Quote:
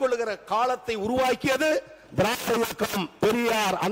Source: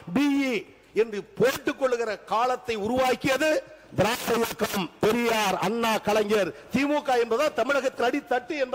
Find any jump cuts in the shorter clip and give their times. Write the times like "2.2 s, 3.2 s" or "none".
none